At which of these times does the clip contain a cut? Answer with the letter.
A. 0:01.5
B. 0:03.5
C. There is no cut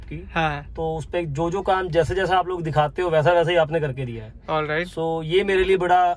C